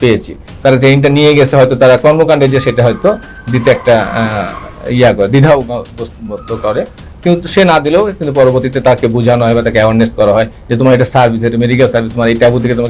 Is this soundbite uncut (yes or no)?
yes